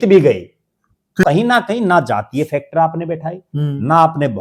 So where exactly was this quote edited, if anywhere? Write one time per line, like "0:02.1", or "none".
0:01.2

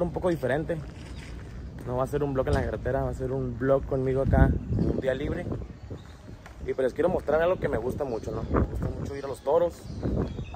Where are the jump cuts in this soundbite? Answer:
none

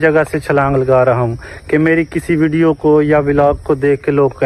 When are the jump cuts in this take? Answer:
none

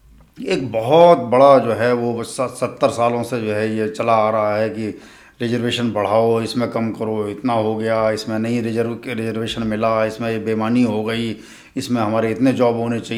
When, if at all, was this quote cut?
none

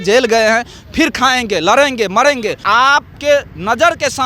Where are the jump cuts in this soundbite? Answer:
0:02.6

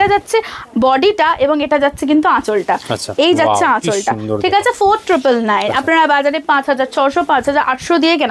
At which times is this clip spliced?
none

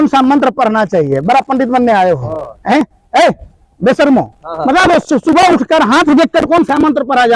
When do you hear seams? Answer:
none

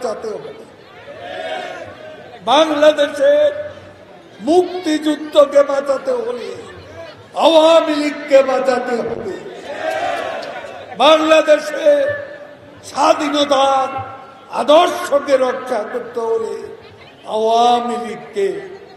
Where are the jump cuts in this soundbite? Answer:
none

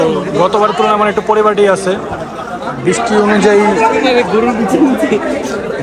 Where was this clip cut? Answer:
none

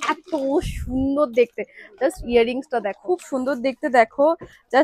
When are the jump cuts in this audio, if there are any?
0:03.0

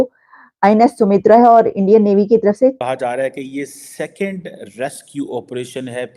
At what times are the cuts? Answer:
0:02.8

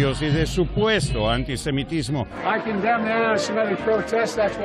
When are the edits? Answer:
0:02.3

